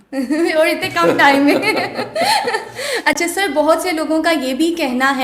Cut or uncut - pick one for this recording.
uncut